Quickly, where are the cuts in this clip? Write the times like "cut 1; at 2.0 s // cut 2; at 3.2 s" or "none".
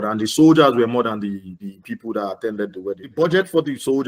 cut 1; at 3.1 s